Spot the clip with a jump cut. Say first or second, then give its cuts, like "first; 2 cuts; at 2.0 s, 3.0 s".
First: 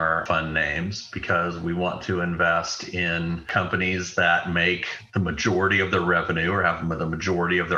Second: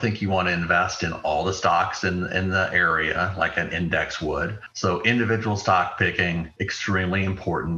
second; 1 cut; at 4.6 s